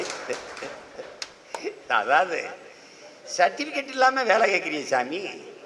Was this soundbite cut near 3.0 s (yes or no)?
no